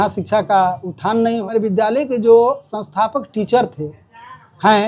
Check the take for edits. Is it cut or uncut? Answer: cut